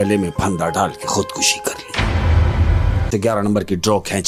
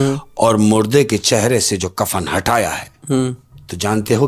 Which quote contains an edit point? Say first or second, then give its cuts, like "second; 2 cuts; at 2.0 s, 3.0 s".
first; 1 cut; at 3.1 s